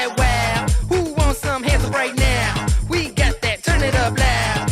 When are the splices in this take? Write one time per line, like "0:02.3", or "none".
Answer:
none